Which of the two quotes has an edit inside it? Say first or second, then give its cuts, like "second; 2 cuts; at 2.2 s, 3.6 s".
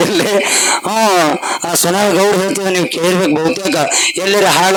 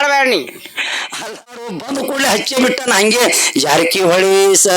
second; 1 cut; at 1.1 s